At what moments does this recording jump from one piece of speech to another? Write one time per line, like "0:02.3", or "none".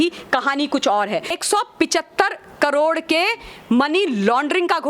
0:01.4